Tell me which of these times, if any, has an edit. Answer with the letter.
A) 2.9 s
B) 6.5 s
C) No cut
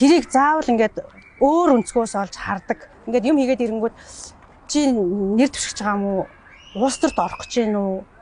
A